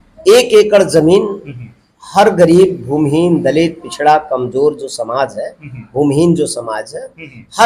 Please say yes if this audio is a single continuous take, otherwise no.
yes